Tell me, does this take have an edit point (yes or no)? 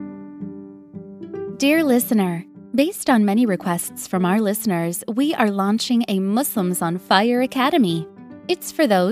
yes